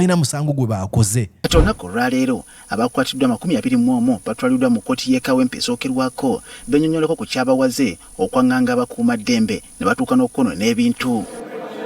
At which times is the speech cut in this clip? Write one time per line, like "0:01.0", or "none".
0:01.3